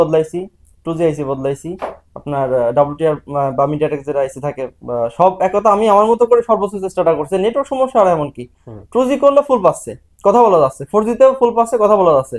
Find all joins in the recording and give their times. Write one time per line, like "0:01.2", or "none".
none